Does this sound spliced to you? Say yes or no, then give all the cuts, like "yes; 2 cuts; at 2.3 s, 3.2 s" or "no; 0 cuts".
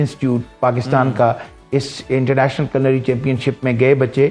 no; 0 cuts